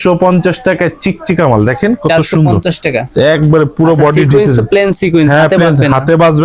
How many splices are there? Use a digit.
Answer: 0